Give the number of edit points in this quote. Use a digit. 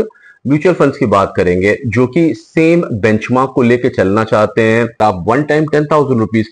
1